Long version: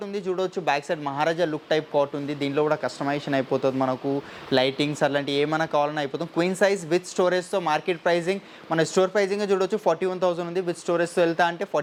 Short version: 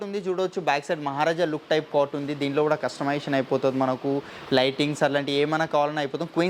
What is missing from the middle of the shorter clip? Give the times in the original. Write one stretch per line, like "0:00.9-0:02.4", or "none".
none